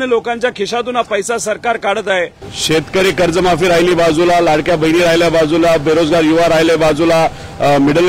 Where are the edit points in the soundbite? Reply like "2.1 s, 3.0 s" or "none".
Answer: 2.4 s